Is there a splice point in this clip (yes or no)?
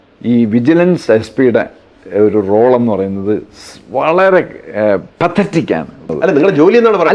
yes